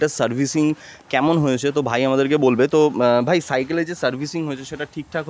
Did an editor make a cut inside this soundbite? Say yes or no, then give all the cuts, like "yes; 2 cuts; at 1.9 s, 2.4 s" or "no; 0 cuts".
no; 0 cuts